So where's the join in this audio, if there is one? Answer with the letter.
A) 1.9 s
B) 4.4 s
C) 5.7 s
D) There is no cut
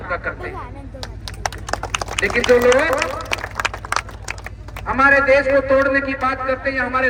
D